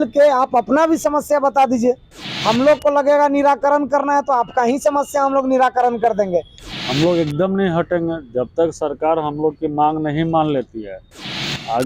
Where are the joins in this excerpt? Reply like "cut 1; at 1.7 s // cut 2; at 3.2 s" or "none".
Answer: cut 1; at 6.6 s